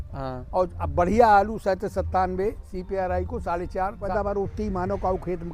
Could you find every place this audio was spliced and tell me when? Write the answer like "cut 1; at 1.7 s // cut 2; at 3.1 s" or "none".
cut 1; at 4.1 s